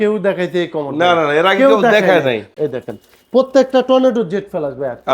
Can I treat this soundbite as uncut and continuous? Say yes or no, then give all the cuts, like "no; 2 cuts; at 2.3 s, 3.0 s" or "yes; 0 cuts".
no; 1 cut; at 2.5 s